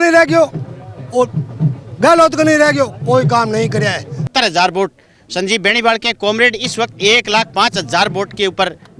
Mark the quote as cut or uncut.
cut